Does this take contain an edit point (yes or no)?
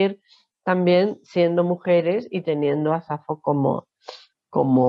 no